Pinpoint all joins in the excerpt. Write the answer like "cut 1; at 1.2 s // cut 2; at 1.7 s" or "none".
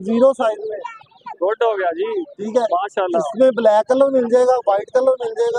none